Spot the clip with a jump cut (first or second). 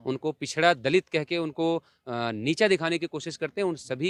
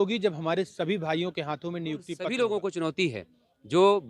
second